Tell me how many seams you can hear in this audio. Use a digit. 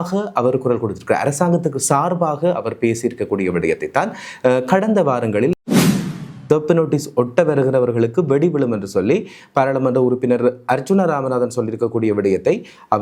1